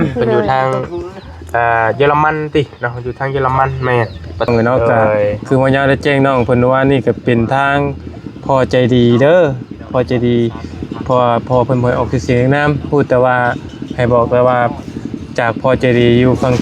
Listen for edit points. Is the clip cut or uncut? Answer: cut